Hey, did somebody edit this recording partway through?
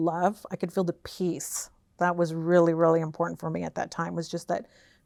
no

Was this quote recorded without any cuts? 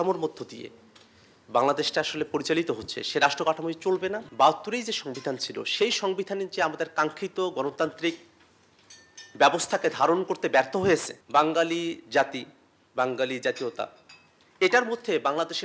no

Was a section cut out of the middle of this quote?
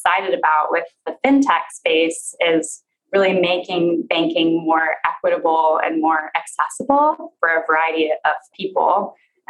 yes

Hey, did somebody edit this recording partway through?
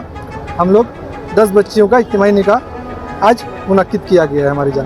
no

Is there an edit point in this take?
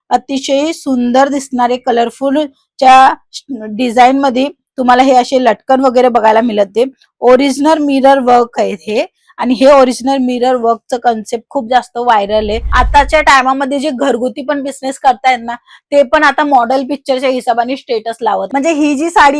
yes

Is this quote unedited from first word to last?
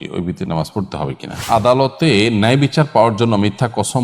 no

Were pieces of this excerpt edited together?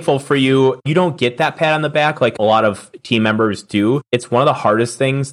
yes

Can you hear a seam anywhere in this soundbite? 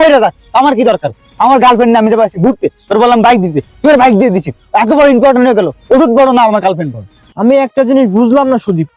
no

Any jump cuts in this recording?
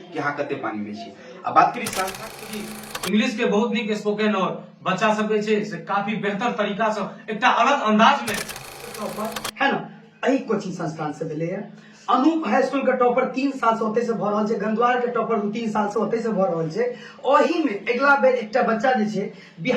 yes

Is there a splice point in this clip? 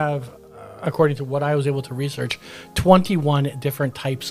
no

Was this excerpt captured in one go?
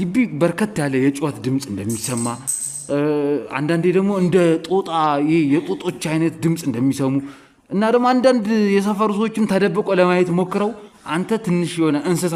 yes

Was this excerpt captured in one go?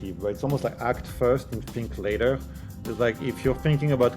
yes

